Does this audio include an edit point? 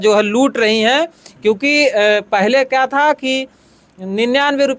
no; 0 cuts

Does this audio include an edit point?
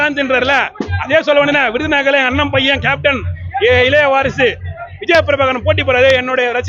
no; 0 cuts

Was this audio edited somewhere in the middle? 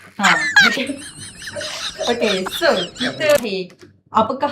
yes; 1 cut; at 3.4 s

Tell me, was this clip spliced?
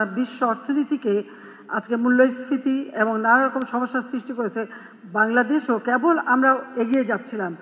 no; 0 cuts

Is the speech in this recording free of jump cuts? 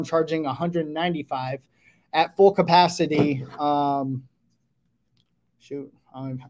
yes; 0 cuts

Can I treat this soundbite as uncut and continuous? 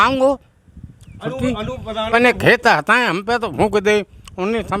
no; 1 cut; at 2.1 s

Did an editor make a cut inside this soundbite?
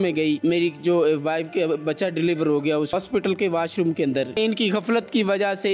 yes; 2 cuts; at 2.9 s, 4.4 s

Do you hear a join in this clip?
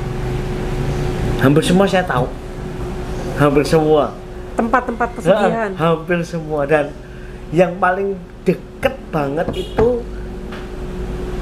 no; 0 cuts

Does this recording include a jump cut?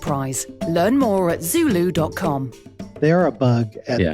yes; 1 cut; at 2.9 s

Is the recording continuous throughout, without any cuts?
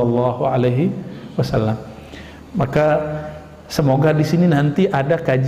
yes; 0 cuts

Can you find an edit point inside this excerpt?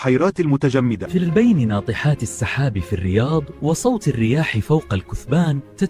yes; 1 cut; at 1.1 s

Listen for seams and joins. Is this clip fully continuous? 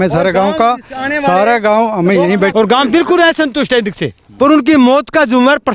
no; 2 cuts; at 2.5 s, 4.2 s

